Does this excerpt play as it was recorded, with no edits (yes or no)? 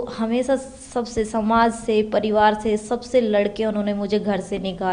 yes